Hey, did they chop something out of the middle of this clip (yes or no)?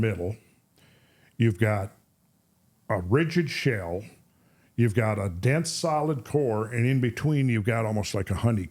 no